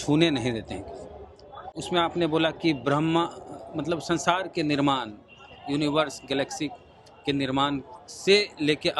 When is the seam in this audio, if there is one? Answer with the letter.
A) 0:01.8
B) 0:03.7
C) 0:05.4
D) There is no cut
A